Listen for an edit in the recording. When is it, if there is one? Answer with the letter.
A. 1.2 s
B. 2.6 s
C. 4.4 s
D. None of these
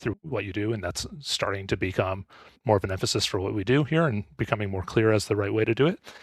B